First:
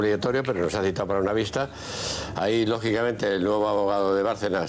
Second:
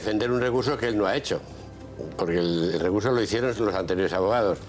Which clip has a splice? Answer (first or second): first